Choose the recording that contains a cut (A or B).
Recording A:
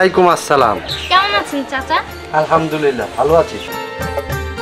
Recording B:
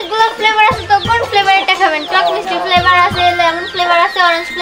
A